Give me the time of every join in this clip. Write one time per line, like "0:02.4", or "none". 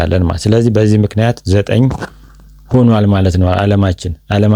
none